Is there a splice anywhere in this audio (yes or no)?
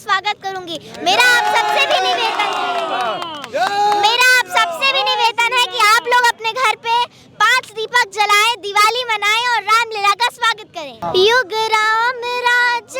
yes